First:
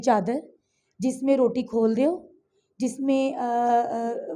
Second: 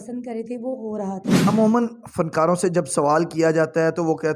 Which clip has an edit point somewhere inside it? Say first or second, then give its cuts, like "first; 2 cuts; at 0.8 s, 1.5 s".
second; 1 cut; at 1.4 s